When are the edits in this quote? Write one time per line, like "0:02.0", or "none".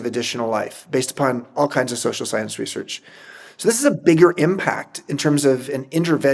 none